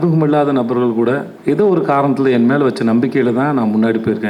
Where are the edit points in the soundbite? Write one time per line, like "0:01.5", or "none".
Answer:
0:01.3

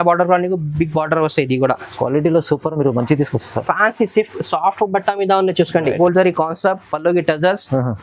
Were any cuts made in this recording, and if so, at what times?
0:06.0

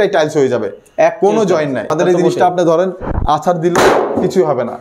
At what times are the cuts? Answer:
0:01.9

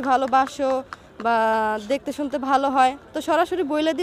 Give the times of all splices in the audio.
none

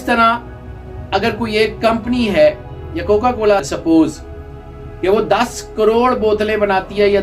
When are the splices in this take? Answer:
0:03.6

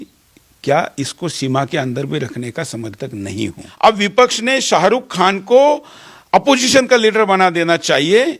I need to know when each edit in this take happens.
0:03.6

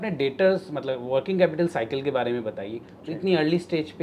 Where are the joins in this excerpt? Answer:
0:02.8

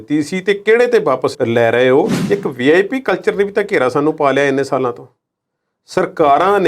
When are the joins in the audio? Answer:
0:02.2

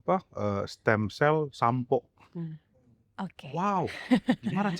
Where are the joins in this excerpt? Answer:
none

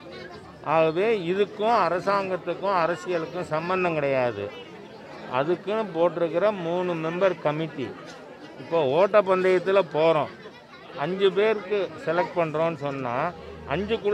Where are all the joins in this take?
none

